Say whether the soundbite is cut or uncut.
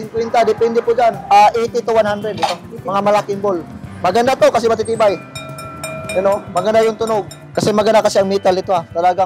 cut